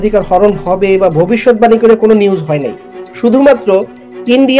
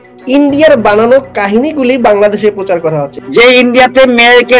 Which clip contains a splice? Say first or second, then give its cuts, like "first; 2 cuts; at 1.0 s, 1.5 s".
second; 1 cut; at 3.2 s